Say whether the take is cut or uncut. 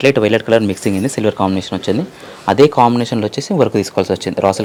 uncut